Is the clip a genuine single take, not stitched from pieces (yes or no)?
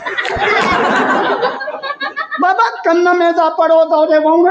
yes